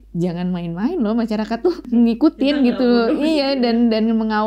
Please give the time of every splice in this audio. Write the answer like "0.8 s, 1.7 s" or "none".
1.9 s